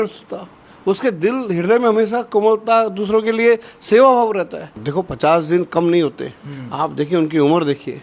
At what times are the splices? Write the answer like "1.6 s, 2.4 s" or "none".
4.8 s